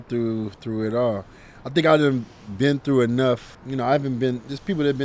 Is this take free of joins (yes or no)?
no